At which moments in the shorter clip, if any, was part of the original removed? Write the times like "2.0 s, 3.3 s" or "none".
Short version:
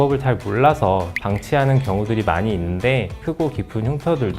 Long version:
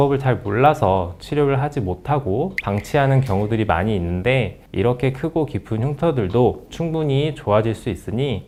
1.2 s, 3.2 s